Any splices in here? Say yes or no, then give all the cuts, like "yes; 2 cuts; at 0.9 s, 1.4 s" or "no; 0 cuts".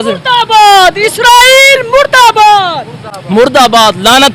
no; 0 cuts